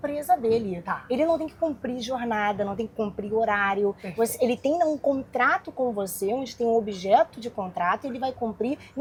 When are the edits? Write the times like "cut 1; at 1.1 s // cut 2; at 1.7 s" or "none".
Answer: none